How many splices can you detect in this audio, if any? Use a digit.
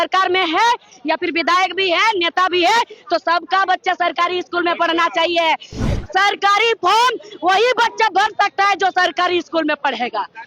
1